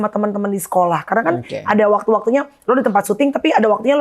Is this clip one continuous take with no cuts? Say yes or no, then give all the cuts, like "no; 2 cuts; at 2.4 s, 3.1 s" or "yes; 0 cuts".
yes; 0 cuts